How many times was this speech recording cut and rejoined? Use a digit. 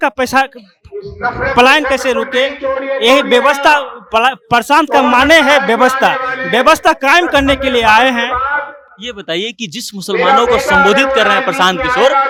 0